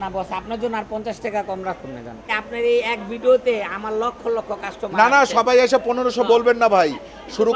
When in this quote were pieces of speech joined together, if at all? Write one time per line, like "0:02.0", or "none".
0:02.4